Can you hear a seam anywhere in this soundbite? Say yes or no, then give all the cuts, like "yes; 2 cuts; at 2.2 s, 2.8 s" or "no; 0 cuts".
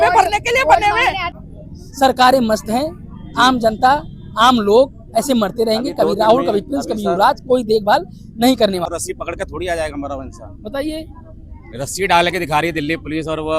yes; 2 cuts; at 1.3 s, 8.8 s